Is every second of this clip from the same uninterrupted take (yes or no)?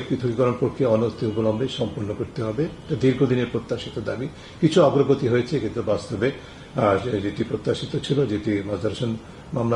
yes